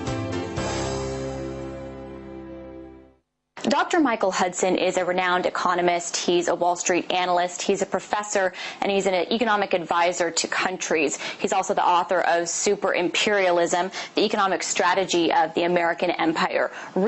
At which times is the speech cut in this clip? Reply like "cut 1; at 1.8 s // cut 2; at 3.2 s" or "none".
cut 1; at 15.3 s